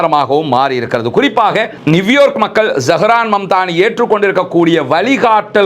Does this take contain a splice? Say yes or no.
yes